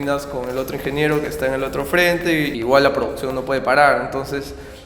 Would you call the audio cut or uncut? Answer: cut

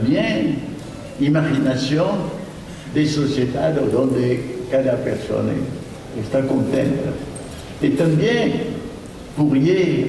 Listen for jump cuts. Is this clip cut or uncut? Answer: uncut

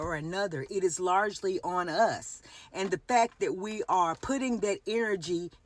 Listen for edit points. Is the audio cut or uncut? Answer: uncut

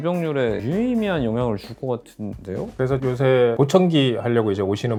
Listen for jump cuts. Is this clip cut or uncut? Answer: uncut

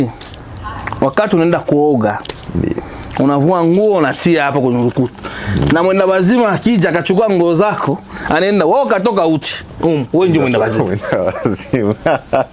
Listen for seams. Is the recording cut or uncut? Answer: uncut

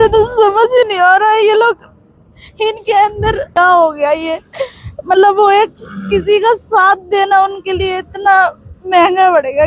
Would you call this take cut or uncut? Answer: cut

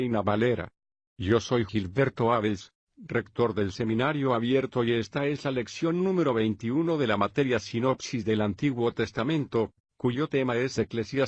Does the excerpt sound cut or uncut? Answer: uncut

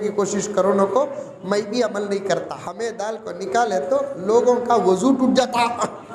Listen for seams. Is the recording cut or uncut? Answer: cut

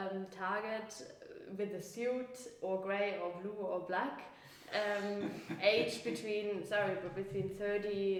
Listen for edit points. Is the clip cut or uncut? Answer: uncut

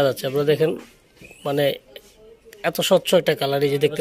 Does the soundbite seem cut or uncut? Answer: uncut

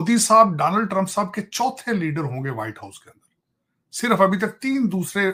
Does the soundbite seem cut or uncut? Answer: uncut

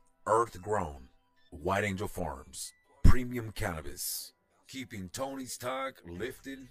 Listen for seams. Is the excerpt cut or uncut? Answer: uncut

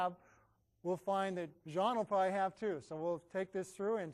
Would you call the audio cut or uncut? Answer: uncut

